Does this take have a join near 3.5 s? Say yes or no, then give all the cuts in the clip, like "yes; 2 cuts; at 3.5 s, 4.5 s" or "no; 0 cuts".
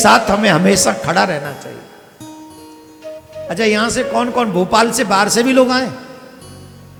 no; 0 cuts